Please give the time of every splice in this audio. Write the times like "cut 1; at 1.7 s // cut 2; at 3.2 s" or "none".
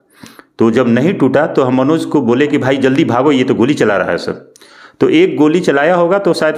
none